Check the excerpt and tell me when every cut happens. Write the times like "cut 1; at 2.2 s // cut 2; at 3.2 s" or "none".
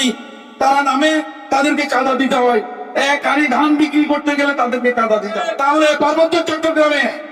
cut 1; at 5.4 s

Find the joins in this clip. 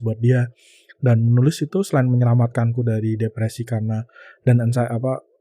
none

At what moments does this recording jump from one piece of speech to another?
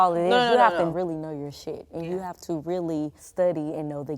cut 1; at 0.9 s // cut 2; at 3.2 s

